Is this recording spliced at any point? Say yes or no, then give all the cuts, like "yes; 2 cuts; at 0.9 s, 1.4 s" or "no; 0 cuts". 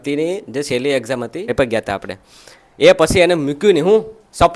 yes; 1 cut; at 1.5 s